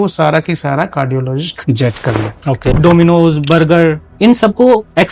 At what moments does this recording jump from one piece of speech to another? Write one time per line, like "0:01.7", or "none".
0:02.7
0:04.1